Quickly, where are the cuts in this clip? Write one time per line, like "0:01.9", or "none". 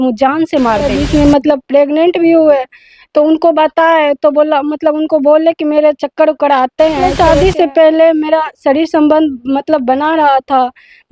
0:01.0
0:07.0

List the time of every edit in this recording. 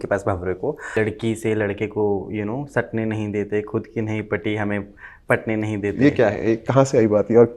0:00.9

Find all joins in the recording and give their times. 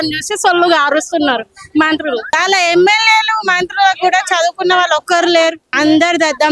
0:02.3
0:05.6

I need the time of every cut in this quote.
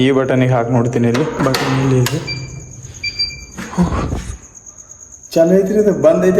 0:01.4

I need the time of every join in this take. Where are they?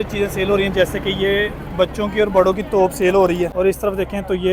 0:03.5

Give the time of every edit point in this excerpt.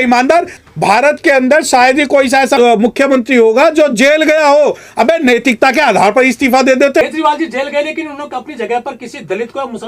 0:07.0

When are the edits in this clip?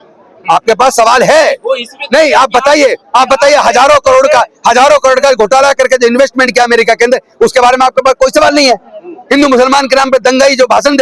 none

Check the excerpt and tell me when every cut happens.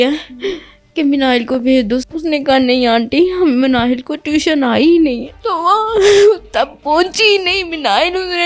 0:02.0
0:05.3

